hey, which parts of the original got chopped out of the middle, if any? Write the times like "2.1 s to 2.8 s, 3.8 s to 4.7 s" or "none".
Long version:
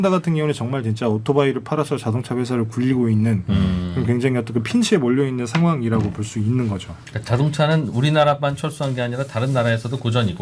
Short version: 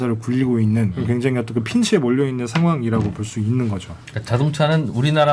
3.4 s to 3.9 s